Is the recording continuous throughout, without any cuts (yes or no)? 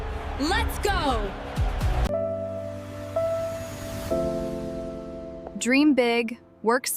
no